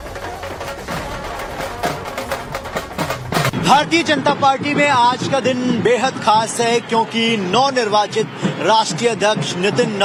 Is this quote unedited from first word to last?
yes; 0 cuts

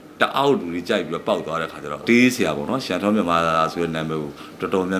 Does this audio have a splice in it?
yes; 1 cut; at 2.0 s

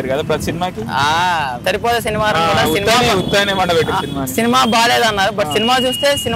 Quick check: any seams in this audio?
yes; 1 cut; at 1.6 s

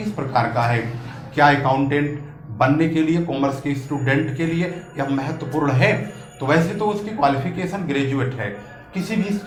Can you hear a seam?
no; 0 cuts

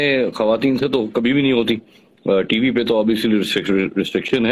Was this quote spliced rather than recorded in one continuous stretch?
no; 0 cuts

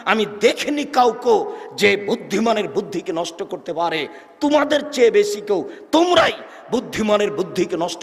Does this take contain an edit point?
no; 0 cuts

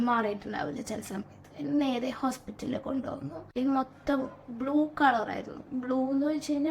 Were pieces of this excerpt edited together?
yes; 1 cut; at 3.5 s

